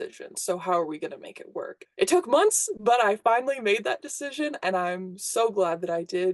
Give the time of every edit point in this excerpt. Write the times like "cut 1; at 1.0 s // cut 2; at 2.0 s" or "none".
cut 1; at 1.8 s